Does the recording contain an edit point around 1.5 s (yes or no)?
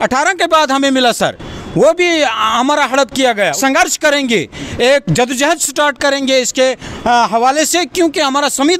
no